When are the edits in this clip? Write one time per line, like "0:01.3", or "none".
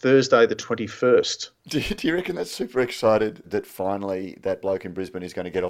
0:03.4